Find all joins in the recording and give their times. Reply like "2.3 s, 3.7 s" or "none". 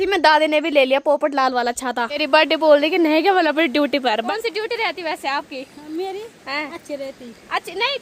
2.2 s, 4.3 s